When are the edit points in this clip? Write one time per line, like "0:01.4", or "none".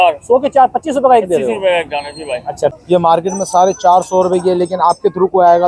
0:02.8